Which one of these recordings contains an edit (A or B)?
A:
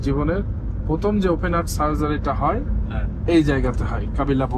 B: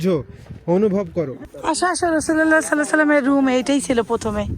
B